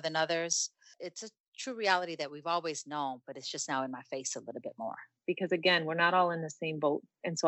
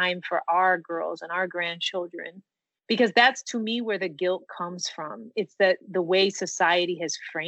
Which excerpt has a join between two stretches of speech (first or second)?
first